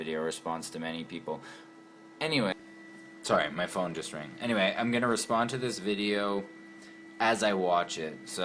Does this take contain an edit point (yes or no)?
no